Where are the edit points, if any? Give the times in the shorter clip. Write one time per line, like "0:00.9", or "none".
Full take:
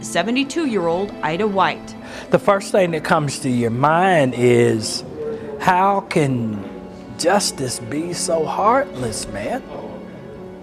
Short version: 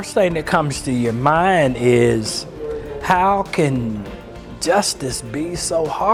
none